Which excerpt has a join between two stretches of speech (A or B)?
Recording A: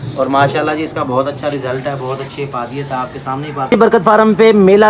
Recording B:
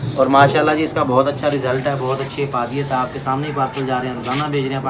A